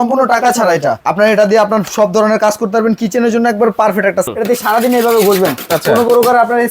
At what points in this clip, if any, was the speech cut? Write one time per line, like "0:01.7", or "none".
0:01.0
0:04.3